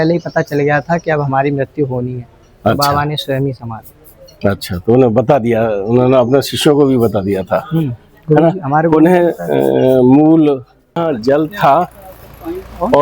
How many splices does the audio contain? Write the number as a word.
one